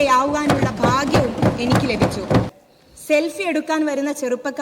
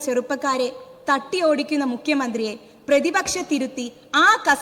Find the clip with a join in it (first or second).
first